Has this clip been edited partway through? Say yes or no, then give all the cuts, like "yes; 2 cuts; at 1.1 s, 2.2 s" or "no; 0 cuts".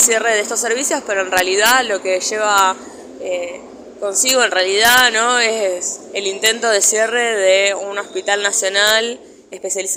no; 0 cuts